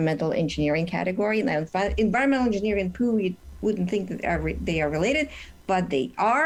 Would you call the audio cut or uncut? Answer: uncut